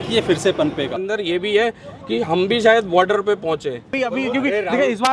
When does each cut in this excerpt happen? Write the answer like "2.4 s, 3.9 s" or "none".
1.0 s, 3.9 s

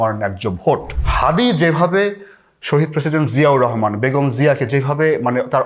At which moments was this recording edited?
1.0 s

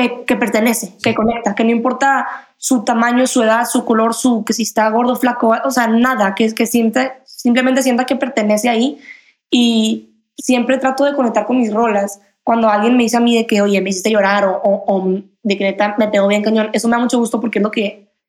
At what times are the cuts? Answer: 1.0 s, 10.2 s

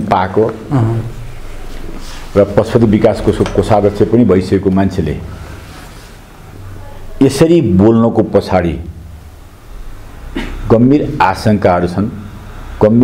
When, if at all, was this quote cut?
none

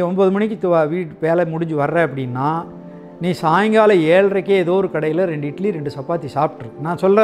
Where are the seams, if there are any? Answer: none

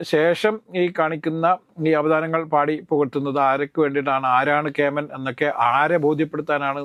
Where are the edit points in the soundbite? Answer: none

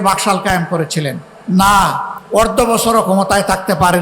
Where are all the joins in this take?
1.3 s, 2.1 s

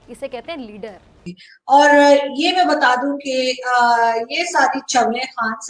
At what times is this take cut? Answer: 1.2 s

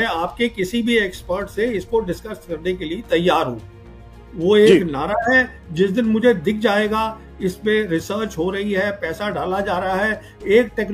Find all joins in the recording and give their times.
none

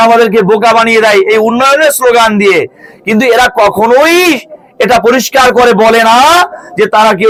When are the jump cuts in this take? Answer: none

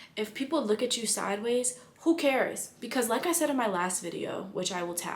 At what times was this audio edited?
none

